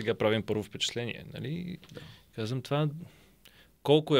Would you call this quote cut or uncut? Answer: uncut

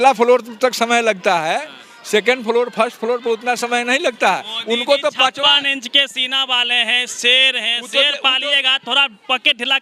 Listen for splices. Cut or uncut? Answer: uncut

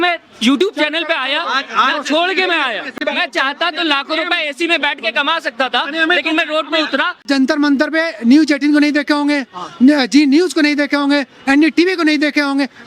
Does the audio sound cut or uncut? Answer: cut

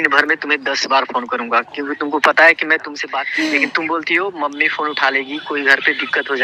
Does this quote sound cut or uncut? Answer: cut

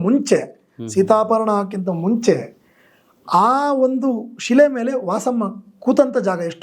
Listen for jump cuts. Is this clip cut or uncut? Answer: uncut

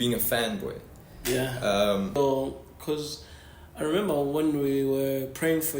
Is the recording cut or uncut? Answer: cut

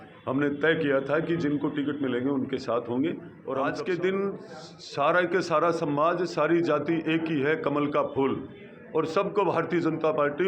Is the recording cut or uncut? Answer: cut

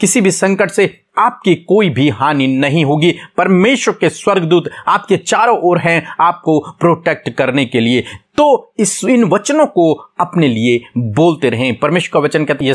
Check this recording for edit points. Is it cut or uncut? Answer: uncut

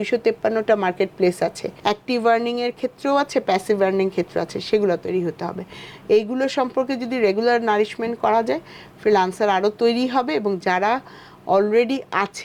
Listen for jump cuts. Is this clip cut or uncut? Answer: uncut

